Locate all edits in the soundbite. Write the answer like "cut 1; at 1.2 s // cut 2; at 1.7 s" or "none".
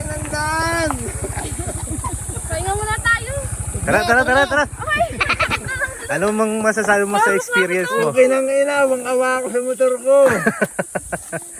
none